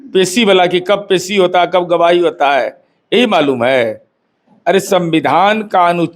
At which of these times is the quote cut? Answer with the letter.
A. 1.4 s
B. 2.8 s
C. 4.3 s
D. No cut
D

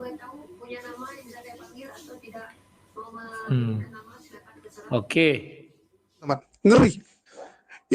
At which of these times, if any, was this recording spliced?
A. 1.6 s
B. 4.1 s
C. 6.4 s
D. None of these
C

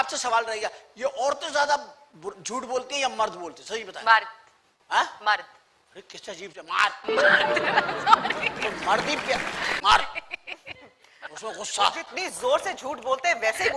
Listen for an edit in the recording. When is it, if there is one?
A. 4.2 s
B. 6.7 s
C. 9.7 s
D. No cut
C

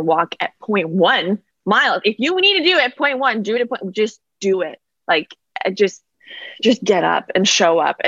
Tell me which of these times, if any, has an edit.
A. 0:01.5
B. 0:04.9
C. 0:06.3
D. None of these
A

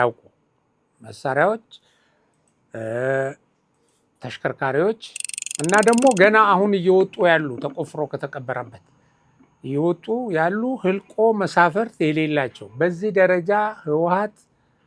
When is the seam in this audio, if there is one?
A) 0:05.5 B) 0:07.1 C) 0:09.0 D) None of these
A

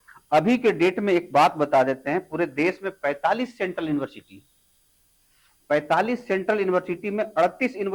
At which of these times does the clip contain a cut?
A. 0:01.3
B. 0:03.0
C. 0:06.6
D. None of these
D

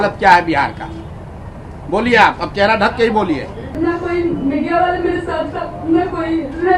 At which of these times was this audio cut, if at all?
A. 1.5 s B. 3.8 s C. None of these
B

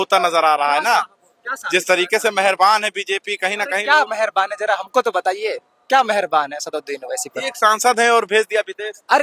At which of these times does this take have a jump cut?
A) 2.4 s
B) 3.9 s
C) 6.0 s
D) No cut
D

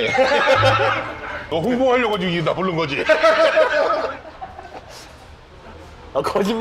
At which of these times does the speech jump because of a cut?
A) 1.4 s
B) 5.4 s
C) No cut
A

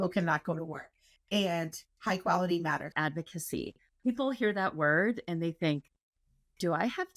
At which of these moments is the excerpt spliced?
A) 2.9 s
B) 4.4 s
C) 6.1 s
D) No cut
A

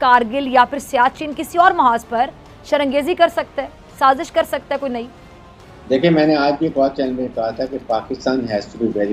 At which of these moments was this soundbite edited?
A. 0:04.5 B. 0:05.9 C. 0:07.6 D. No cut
D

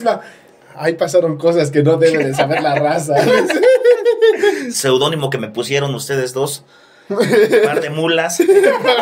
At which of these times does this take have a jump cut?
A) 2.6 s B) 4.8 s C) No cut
B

